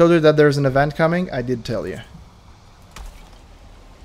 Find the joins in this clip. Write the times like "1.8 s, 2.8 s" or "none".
3.1 s